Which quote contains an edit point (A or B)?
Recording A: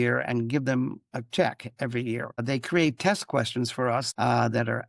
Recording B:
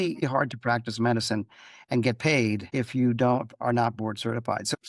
A